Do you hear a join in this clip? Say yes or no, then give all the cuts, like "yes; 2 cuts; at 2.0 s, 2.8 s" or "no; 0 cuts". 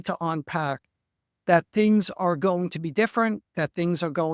no; 0 cuts